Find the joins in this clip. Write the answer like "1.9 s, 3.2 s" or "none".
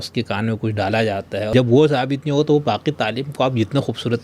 1.5 s